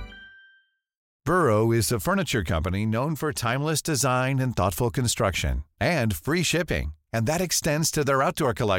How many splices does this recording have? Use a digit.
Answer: 1